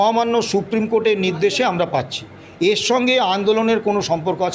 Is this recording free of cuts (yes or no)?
yes